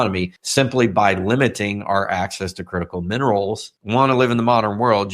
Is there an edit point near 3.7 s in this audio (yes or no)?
yes